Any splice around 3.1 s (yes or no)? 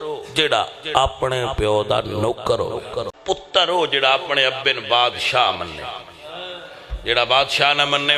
yes